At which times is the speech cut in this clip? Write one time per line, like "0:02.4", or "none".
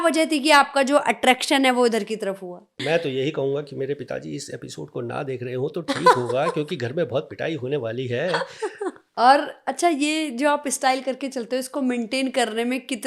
0:02.7
0:09.0